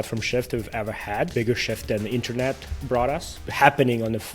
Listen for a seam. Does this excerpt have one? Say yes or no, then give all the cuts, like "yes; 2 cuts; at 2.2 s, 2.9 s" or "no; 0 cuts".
yes; 2 cuts; at 1.3 s, 3.4 s